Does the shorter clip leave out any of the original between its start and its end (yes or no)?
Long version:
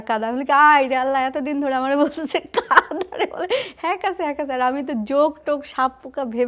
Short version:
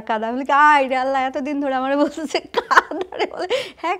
no